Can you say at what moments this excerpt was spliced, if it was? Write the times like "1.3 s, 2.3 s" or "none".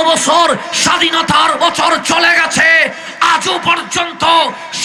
none